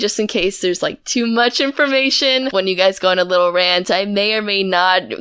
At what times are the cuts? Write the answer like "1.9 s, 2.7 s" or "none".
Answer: 2.5 s